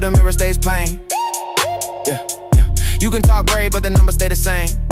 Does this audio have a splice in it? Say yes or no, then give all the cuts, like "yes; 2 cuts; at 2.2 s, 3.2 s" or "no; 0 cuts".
no; 0 cuts